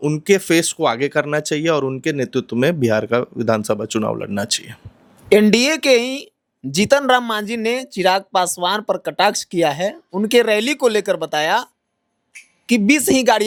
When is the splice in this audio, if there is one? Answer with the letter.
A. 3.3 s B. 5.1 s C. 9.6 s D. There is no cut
D